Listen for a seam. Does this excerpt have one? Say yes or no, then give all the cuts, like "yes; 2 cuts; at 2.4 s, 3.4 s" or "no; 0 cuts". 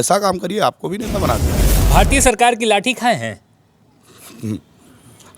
yes; 1 cut; at 1.6 s